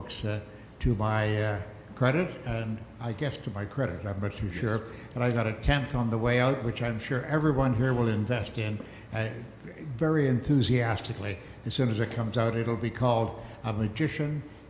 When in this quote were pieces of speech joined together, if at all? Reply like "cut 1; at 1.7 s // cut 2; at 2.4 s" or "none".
cut 1; at 6.1 s

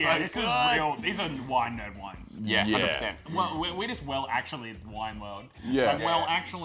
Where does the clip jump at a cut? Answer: cut 1; at 3.2 s

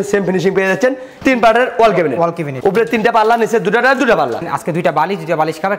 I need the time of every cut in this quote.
cut 1; at 1.1 s // cut 2; at 4.4 s

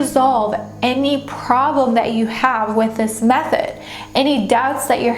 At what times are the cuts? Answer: none

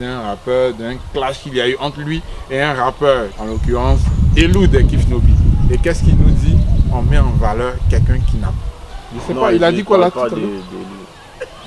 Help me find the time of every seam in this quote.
cut 1; at 3.4 s

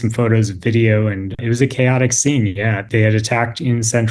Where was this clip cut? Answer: cut 1; at 1.4 s // cut 2; at 2.8 s

